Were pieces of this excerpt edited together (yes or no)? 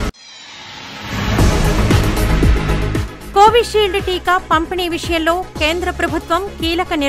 no